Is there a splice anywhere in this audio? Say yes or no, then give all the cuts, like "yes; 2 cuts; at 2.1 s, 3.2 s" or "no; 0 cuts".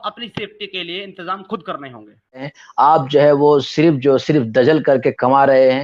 yes; 1 cut; at 2.6 s